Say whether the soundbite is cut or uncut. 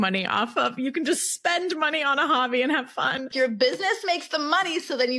cut